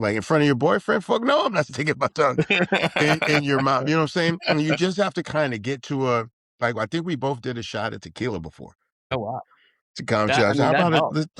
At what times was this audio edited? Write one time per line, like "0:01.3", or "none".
0:09.1